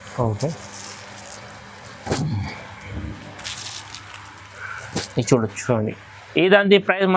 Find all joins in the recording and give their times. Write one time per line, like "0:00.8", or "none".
none